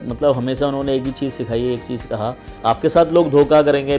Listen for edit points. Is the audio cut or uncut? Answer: cut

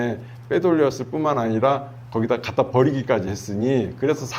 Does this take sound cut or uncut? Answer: uncut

